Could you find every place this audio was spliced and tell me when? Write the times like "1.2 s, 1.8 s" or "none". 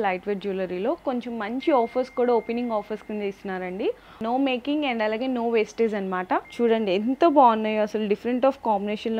4.2 s, 6.5 s